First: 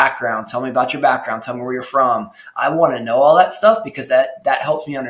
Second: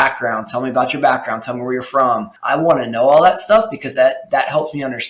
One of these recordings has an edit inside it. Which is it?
second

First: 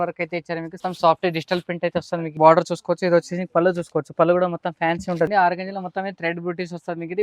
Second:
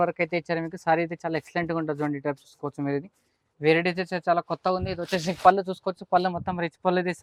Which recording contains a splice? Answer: first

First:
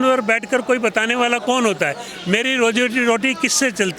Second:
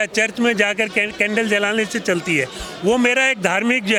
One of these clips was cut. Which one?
first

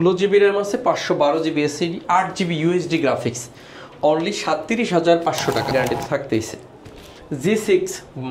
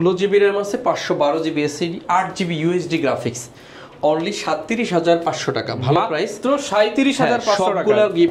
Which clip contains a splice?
first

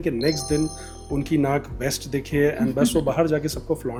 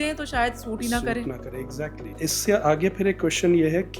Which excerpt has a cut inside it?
second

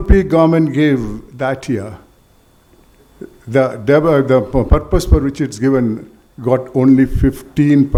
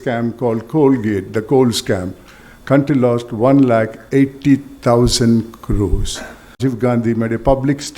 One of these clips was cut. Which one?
second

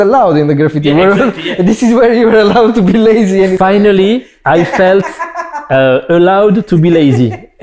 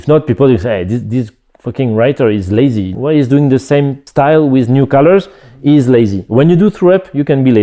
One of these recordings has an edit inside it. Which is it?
second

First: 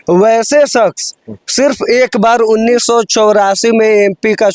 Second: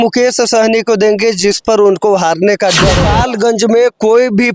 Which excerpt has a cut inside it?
second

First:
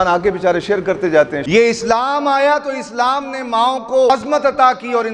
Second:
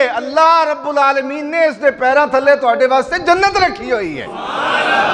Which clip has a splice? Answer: first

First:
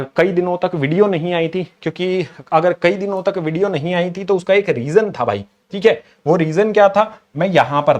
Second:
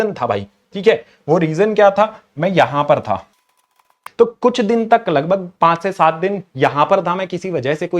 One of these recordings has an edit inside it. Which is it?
second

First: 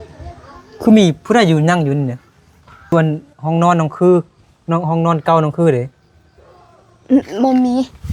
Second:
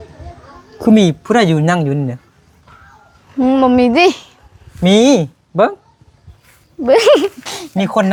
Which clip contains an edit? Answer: first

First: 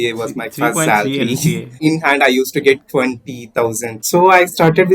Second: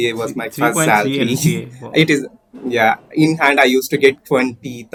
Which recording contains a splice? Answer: first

